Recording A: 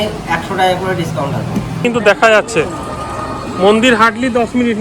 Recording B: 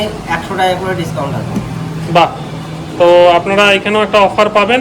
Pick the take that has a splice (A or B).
A